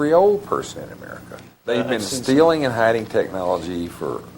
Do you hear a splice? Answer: yes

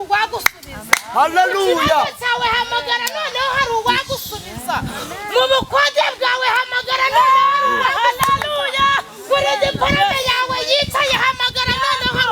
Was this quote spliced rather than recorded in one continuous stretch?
no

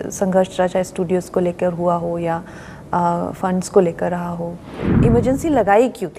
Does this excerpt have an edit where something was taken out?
yes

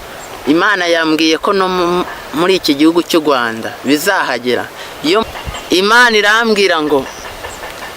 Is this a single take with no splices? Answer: no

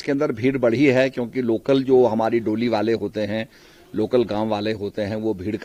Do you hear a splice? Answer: no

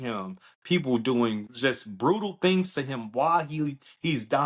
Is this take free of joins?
no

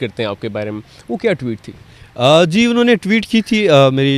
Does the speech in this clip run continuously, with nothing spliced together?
yes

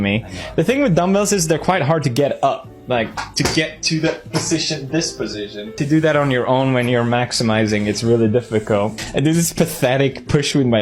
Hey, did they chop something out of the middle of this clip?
yes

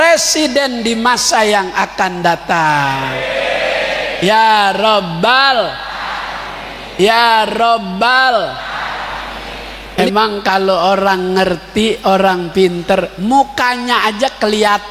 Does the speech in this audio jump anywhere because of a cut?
yes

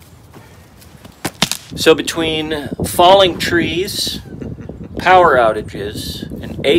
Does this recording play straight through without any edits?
no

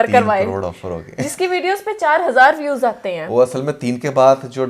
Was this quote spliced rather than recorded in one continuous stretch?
no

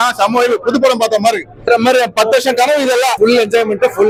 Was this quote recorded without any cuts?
yes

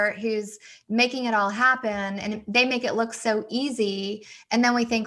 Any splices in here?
no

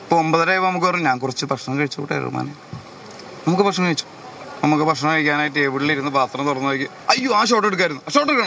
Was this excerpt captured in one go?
yes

